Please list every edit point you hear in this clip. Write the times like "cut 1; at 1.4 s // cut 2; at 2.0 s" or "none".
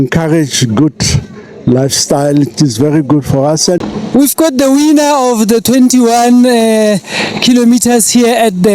cut 1; at 3.8 s